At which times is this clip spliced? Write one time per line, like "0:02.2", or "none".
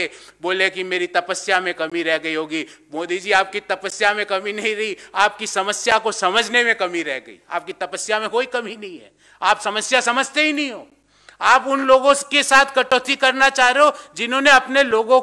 none